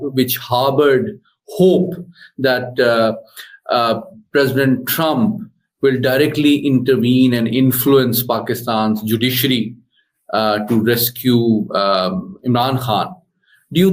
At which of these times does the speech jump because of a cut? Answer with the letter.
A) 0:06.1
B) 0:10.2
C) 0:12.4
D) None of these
D